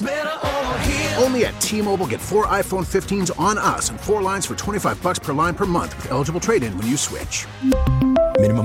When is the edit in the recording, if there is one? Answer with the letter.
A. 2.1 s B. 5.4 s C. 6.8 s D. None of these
D